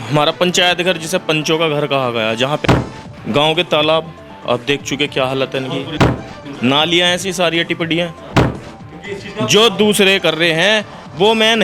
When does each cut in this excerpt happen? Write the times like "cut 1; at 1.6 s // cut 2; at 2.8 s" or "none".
cut 1; at 2.6 s // cut 2; at 6.3 s // cut 3; at 8.5 s